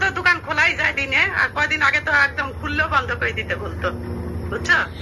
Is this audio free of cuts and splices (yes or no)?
yes